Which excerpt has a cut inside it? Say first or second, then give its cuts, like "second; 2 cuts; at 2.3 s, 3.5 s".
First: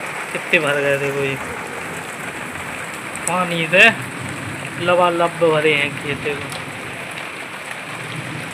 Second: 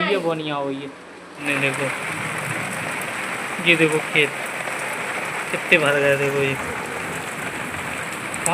second; 1 cut; at 1.4 s